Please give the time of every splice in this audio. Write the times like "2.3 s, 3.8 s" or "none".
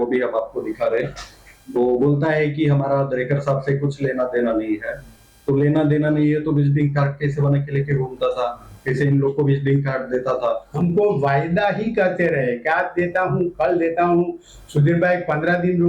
10.7 s